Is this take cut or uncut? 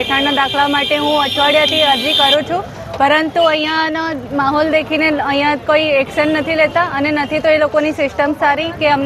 uncut